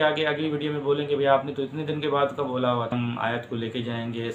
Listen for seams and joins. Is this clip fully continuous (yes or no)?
no